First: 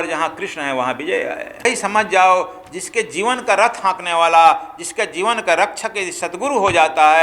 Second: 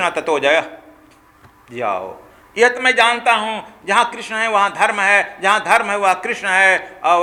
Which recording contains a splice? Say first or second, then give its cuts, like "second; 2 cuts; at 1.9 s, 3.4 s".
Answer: first; 1 cut; at 1.6 s